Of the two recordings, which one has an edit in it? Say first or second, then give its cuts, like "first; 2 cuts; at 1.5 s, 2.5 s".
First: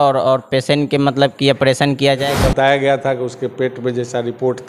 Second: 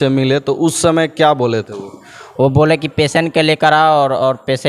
first; 1 cut; at 2.2 s